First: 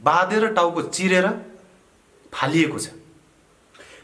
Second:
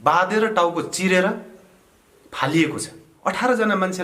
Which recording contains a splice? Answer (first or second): second